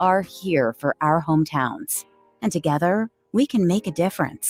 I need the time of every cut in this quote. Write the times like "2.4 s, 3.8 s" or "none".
none